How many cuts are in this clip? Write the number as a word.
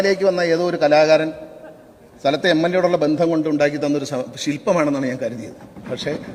zero